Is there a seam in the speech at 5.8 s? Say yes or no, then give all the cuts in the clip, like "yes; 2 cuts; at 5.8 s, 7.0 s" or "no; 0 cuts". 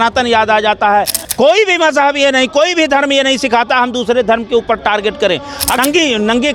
yes; 2 cuts; at 1.2 s, 5.8 s